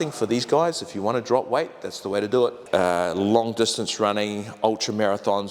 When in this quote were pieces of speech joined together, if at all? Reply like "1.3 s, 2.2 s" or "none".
2.6 s

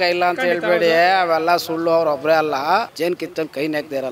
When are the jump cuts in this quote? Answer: 2.9 s

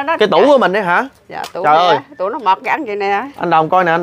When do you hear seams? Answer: none

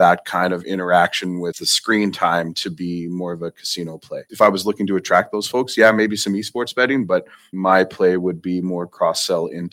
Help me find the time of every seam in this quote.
1.7 s, 4.2 s, 7.5 s

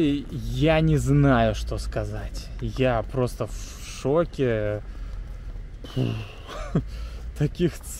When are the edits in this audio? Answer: none

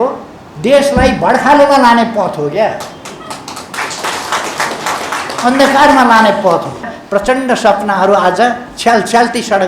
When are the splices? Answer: 7.0 s

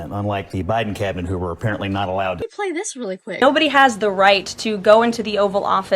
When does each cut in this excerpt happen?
2.5 s

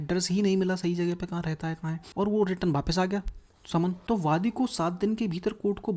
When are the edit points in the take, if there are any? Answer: 2.0 s, 4.0 s

